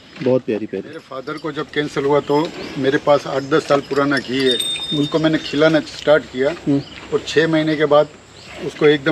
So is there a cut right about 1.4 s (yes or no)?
yes